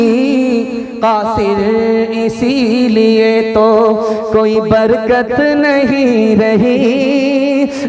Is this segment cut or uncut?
uncut